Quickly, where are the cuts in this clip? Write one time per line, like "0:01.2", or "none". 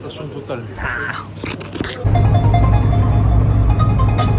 none